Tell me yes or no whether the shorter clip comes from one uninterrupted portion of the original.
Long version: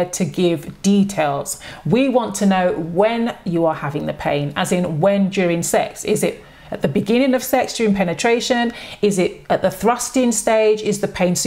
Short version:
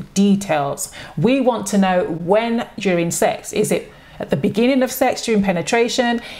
no